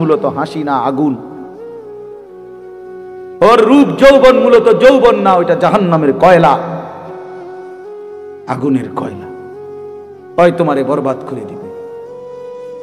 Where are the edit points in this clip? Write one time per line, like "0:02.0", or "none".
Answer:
none